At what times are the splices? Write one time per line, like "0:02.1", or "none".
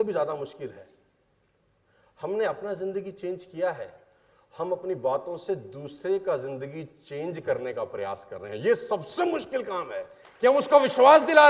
none

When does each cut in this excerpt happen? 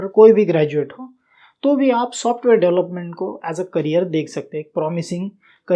none

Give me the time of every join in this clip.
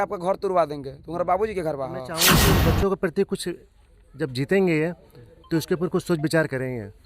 0:02.4

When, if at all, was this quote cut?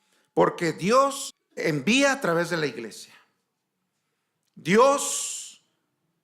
0:01.3

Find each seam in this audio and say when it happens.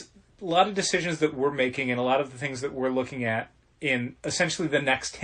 0:04.2

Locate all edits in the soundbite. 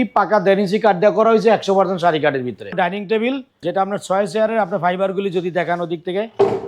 0:02.7
0:03.5

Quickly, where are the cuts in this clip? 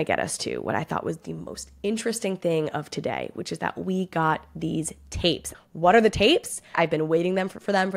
0:05.6
0:06.8

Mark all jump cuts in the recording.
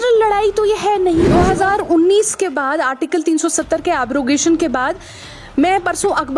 0:01.3

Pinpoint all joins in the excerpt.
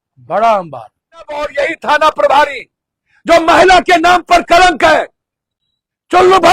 0:01.5

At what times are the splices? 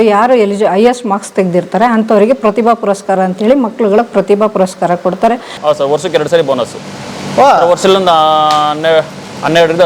0:05.6

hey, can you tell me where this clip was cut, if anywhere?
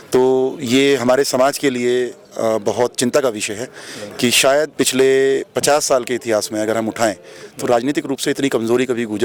none

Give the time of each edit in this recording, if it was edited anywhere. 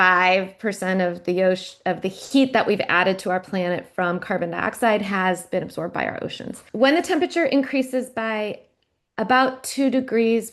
0:06.6

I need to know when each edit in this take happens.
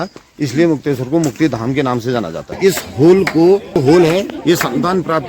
0:02.6

